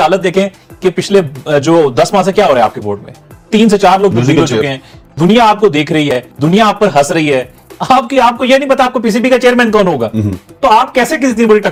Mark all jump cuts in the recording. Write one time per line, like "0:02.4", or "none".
none